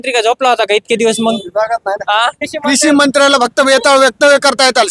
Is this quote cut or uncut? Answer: cut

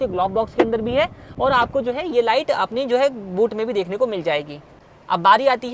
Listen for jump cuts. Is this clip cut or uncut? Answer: uncut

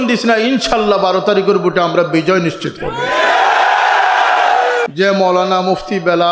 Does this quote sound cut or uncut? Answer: cut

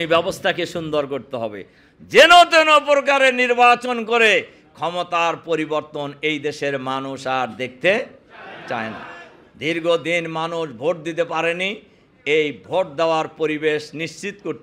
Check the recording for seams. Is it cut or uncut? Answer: uncut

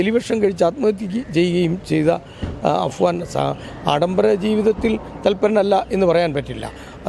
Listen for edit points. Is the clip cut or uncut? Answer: uncut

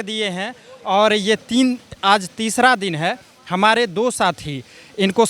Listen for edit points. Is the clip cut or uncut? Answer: uncut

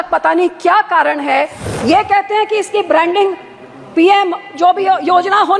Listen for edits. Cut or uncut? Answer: cut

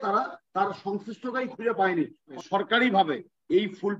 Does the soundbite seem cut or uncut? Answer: cut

